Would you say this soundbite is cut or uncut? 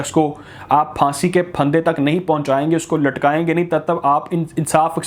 uncut